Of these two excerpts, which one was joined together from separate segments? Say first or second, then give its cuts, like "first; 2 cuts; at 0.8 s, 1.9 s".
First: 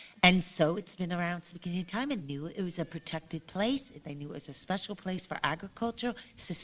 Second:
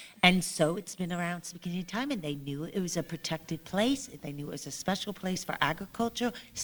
first; 1 cut; at 2.2 s